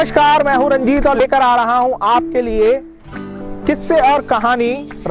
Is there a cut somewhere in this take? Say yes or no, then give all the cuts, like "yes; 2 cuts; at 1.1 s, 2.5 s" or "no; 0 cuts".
yes; 1 cut; at 1.2 s